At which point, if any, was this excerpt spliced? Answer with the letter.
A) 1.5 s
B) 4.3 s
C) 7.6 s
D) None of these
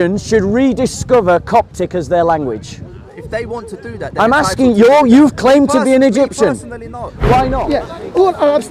C